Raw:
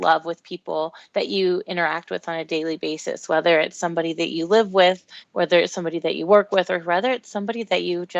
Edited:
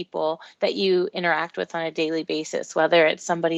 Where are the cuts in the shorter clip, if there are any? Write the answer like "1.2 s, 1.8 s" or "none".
none